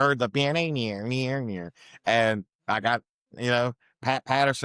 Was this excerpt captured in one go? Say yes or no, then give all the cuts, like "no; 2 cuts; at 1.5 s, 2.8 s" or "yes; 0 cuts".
yes; 0 cuts